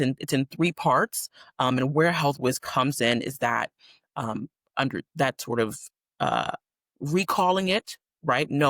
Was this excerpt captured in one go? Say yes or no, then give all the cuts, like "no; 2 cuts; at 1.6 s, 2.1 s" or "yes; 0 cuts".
yes; 0 cuts